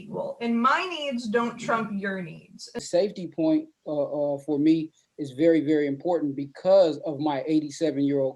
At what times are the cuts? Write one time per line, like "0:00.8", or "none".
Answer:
0:02.6